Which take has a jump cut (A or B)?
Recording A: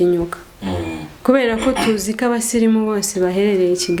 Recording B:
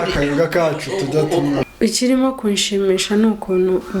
B